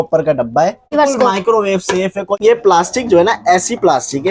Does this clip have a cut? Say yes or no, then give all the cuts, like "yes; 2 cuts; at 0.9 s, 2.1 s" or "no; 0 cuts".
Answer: yes; 2 cuts; at 0.9 s, 2.4 s